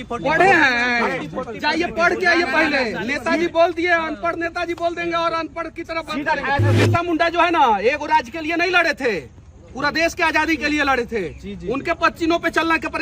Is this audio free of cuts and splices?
no; 1 cut; at 6.7 s

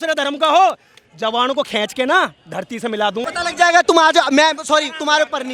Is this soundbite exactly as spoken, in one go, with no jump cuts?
no; 1 cut; at 3.2 s

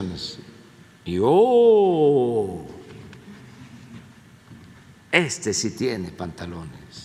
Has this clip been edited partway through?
no; 0 cuts

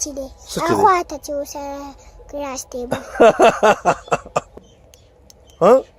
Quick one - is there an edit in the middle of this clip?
yes; 1 cut; at 4.5 s

